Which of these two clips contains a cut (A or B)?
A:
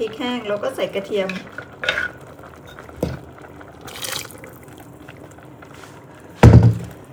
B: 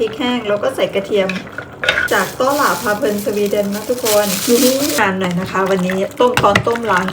B